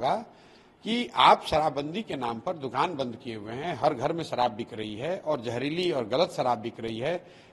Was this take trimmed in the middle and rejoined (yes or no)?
no